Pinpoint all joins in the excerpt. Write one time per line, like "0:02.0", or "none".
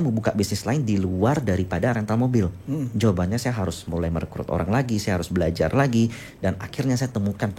none